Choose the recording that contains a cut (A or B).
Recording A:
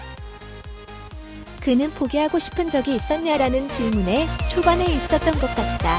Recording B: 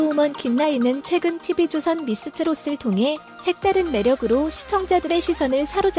A